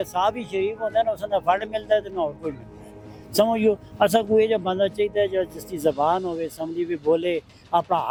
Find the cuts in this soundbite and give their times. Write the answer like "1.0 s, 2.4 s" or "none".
none

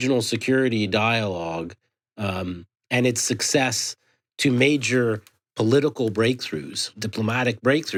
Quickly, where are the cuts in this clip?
none

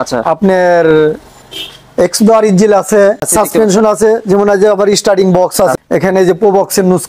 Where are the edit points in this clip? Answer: 3.3 s, 5.7 s

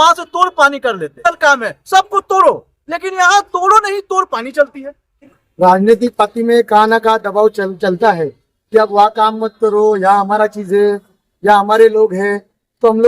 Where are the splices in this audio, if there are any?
1.1 s, 5.4 s

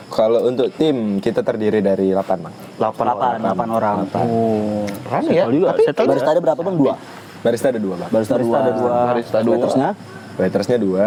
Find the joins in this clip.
none

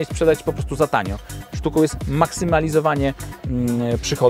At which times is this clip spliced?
none

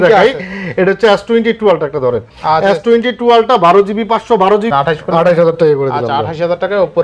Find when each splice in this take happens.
4.7 s

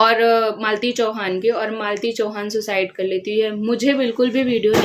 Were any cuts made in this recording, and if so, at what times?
none

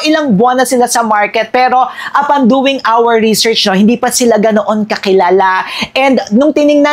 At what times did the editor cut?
none

